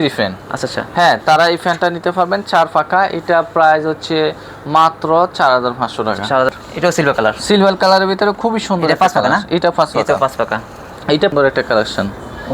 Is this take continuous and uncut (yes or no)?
no